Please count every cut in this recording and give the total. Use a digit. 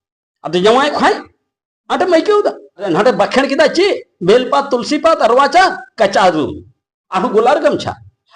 1